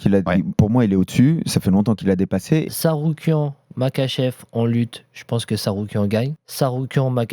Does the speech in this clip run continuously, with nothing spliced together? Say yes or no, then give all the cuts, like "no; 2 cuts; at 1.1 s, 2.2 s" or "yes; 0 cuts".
no; 2 cuts; at 2.7 s, 6.4 s